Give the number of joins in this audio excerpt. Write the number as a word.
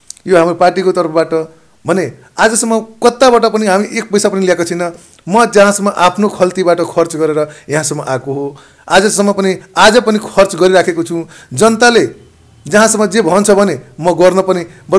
zero